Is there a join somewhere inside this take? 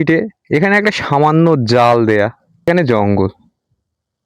yes; 1 cut; at 2.7 s

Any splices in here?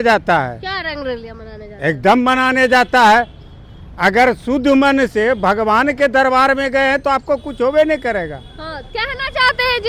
no; 0 cuts

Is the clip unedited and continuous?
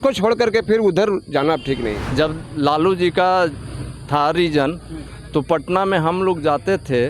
no; 1 cut; at 2.0 s

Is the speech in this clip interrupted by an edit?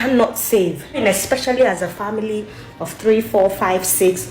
yes; 1 cut; at 1.0 s

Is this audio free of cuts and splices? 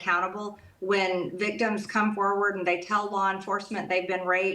yes; 0 cuts

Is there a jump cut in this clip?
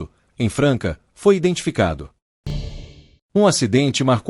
yes; 1 cut; at 2.4 s

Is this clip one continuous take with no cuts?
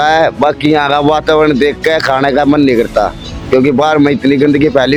yes; 0 cuts

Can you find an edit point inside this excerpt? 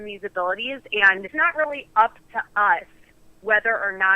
yes; 1 cut; at 1.3 s

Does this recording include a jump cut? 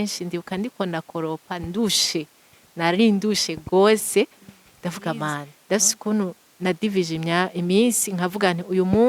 yes; 1 cut; at 5.5 s

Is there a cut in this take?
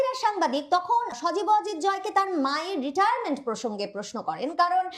yes; 1 cut; at 1.2 s

